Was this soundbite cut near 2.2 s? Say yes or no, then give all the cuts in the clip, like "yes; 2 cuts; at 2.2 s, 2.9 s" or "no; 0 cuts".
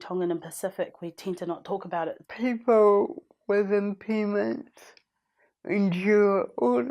yes; 1 cut; at 2.2 s